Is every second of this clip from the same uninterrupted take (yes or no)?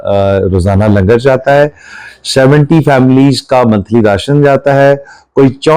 yes